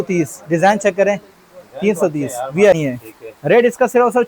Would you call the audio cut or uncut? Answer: cut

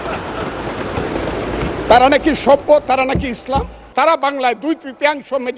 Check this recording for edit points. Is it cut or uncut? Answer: cut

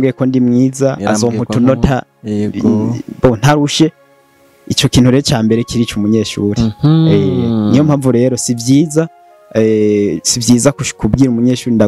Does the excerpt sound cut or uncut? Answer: uncut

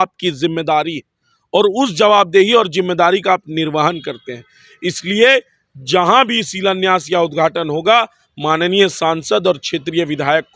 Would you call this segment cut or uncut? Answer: uncut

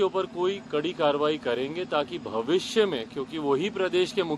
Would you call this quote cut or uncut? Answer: uncut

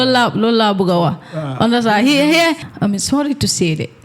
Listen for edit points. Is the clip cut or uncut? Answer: cut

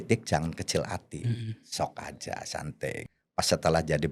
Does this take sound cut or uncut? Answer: cut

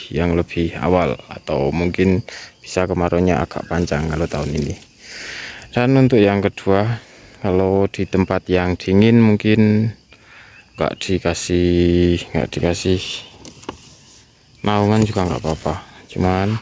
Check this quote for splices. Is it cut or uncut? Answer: uncut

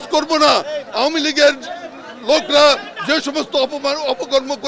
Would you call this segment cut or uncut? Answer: uncut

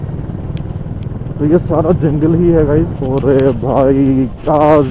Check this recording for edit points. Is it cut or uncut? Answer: cut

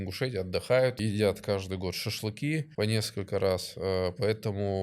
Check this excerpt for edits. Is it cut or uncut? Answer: cut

